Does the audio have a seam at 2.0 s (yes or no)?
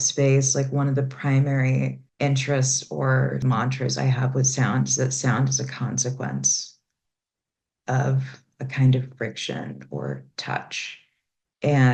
yes